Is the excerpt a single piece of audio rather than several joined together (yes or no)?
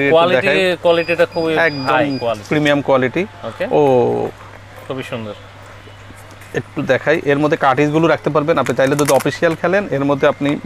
yes